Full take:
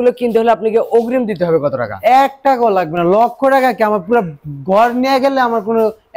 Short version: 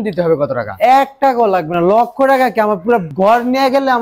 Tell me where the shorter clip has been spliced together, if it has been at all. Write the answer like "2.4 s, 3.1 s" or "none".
3.1 s